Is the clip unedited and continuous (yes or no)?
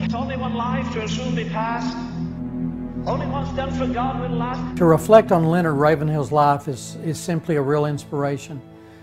no